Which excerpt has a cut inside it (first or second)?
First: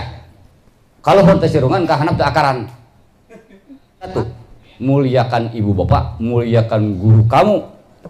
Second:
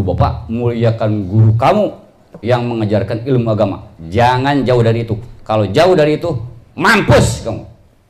first